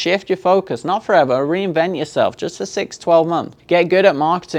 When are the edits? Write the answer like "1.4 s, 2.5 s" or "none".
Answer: 3.5 s